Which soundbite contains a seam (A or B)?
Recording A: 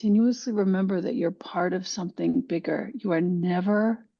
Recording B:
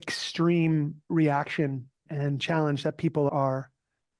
B